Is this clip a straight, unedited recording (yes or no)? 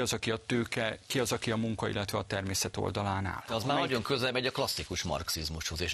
no